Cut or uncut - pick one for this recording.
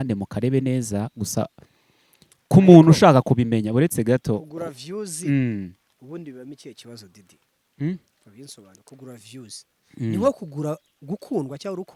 uncut